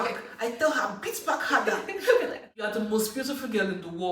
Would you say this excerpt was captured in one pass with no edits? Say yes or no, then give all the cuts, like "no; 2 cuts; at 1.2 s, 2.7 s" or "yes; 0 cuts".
no; 1 cut; at 2.7 s